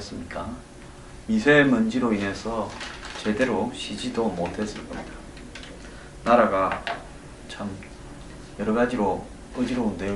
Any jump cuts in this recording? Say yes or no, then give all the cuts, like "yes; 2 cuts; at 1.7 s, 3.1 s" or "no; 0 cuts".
no; 0 cuts